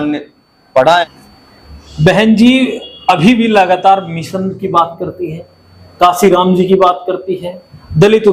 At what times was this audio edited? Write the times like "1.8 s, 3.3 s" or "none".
1.1 s